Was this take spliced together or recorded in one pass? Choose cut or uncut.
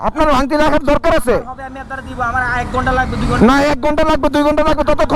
uncut